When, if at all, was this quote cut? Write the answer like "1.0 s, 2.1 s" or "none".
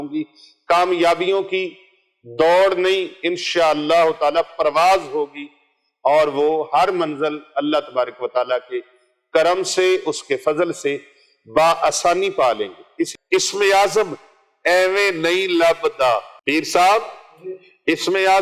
13.2 s, 16.3 s